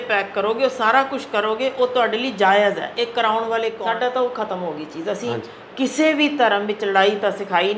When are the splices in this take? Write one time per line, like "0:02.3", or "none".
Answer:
0:03.8